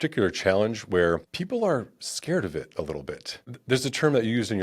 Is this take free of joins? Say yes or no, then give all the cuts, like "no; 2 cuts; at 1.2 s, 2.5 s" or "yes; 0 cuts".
no; 2 cuts; at 1.3 s, 3.5 s